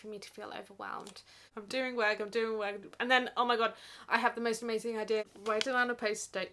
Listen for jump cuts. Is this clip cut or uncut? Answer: cut